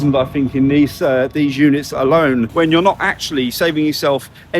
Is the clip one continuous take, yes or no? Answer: no